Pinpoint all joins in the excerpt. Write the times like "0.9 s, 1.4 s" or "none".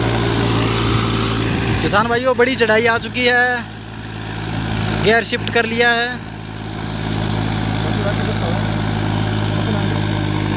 none